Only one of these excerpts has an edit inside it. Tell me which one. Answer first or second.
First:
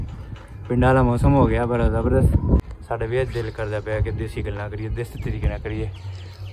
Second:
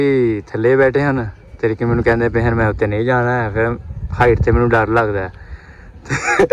first